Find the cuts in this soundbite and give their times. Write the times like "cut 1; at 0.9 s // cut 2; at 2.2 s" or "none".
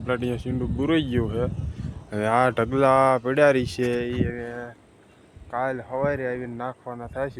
none

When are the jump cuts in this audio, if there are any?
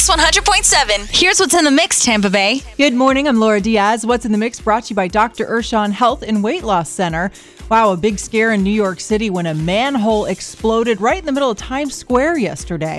cut 1; at 2.6 s

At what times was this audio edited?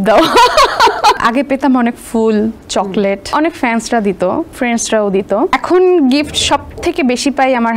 cut 1; at 1.2 s // cut 2; at 3.3 s // cut 3; at 4.5 s // cut 4; at 5.5 s

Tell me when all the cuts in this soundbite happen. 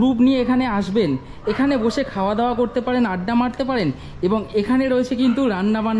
none

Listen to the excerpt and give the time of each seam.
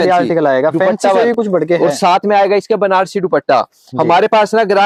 none

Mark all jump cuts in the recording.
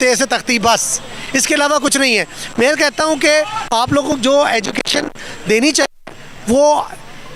none

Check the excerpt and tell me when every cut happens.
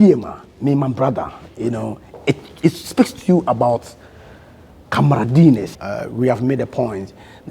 cut 1; at 5.7 s

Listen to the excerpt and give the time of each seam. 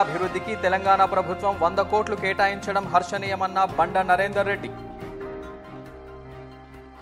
none

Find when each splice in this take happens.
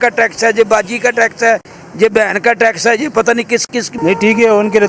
cut 1; at 3.9 s

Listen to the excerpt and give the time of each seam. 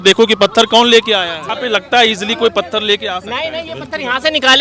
cut 1; at 1.3 s

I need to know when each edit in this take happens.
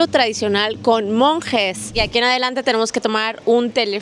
cut 1; at 1.9 s

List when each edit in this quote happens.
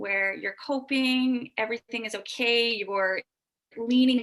none

